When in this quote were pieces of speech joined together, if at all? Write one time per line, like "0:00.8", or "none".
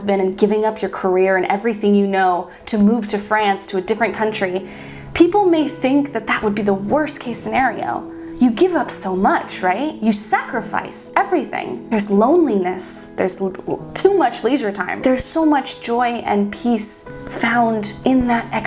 0:11.8
0:15.0